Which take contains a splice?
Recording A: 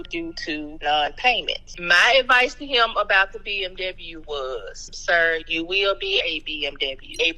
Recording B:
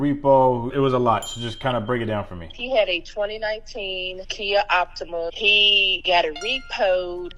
A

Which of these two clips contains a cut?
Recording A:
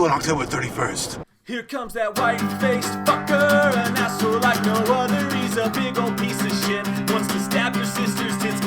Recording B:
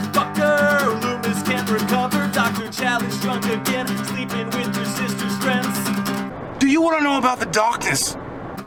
A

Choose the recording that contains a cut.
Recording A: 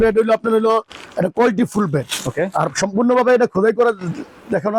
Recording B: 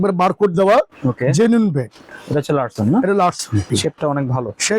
B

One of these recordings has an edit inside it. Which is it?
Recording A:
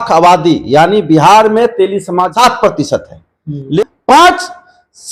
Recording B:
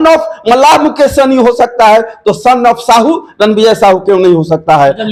A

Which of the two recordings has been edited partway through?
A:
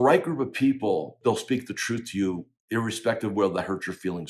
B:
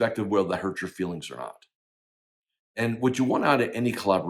A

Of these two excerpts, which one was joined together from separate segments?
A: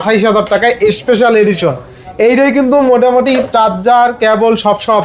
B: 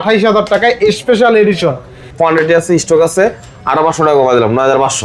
B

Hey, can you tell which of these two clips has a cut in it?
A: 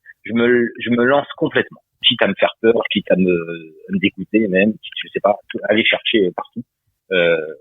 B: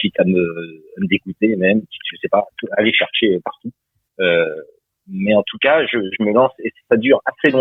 A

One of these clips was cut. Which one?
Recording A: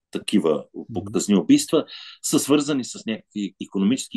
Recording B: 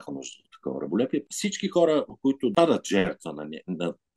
B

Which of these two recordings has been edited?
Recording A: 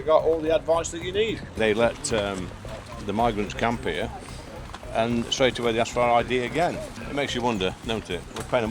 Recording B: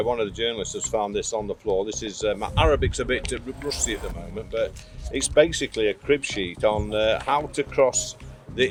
A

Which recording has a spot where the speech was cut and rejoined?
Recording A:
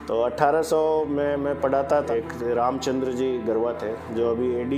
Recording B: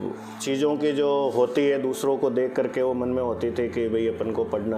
A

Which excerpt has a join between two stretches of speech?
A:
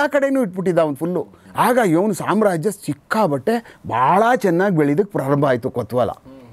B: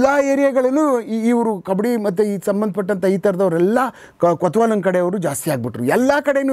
A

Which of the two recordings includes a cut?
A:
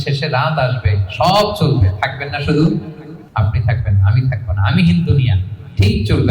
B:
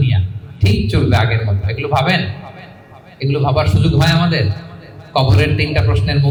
A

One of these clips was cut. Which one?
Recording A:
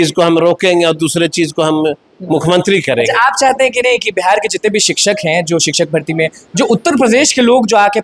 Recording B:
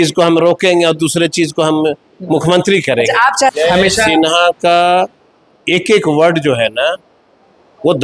B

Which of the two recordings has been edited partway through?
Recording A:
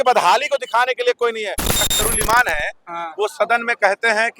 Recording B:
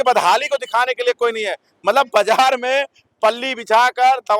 A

